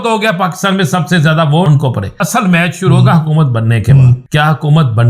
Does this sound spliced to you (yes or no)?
yes